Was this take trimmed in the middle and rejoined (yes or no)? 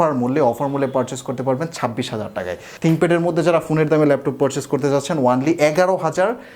yes